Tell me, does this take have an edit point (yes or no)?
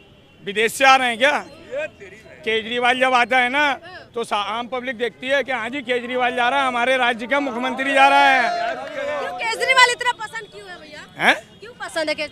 no